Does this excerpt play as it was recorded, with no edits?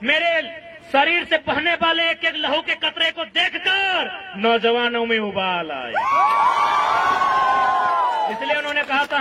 yes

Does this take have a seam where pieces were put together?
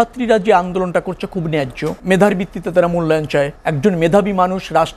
yes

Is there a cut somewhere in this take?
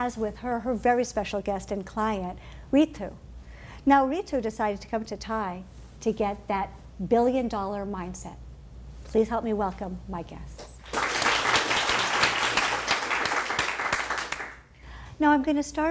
yes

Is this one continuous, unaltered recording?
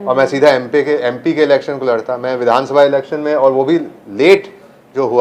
yes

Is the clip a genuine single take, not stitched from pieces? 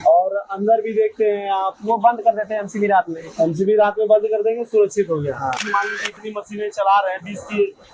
no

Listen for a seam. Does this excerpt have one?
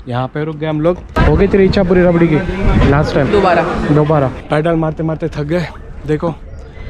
yes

